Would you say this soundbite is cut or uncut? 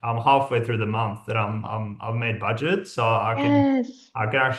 uncut